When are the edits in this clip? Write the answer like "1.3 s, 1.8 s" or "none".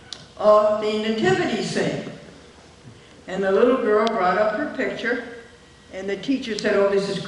none